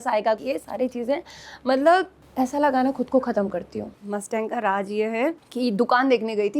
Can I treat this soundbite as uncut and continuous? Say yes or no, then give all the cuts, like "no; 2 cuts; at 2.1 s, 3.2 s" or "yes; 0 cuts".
no; 2 cuts; at 4.0 s, 5.5 s